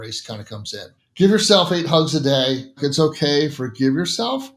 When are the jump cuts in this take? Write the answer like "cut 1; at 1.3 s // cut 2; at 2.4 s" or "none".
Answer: cut 1; at 1.0 s // cut 2; at 2.8 s